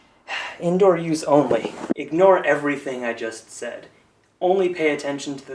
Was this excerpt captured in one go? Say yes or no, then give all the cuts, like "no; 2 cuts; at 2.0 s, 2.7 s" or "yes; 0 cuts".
no; 1 cut; at 2.0 s